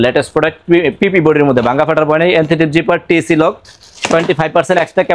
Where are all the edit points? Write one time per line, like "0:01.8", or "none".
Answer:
none